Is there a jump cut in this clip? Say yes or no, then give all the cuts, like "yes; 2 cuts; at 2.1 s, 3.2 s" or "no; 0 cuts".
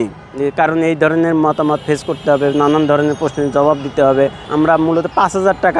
yes; 1 cut; at 4.4 s